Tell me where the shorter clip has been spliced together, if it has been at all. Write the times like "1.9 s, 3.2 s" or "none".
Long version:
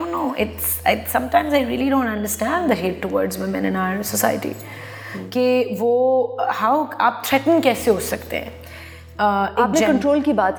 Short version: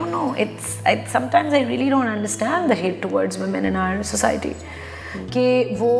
none